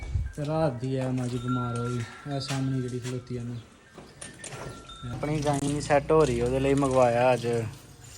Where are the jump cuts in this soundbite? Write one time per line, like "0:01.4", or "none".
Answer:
0:05.2